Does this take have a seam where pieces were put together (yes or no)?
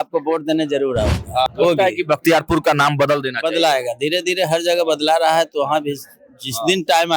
yes